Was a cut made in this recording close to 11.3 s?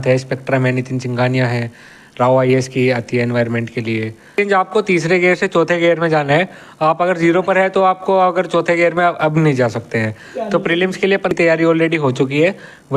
yes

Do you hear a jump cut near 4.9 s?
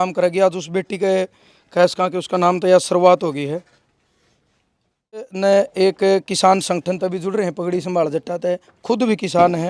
yes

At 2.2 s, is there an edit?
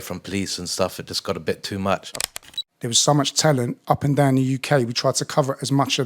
yes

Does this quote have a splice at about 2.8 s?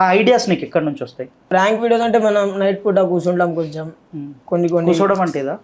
no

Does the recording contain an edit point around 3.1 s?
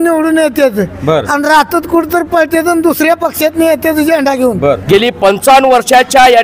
no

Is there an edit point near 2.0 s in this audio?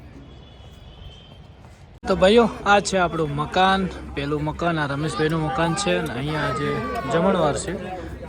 yes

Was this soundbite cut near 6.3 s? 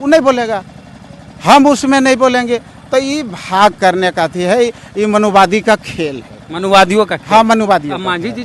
no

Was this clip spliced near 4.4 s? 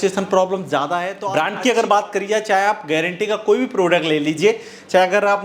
no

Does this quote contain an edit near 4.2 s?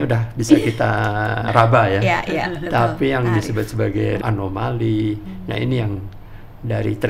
yes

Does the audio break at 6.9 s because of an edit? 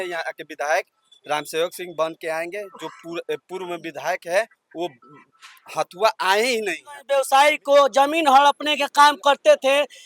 yes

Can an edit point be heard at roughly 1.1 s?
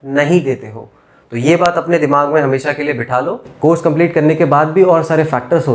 no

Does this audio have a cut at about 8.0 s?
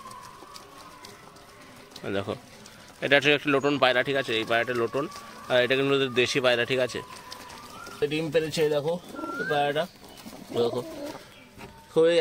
yes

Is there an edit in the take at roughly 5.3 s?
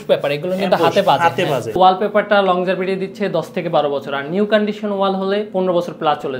no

